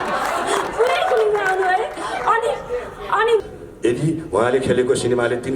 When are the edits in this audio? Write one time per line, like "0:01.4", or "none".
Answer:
0:03.4